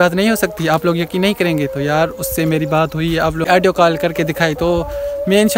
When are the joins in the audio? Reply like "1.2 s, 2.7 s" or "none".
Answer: 3.5 s